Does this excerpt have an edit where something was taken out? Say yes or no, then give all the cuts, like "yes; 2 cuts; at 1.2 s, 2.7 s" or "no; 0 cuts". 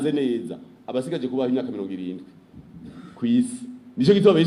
no; 0 cuts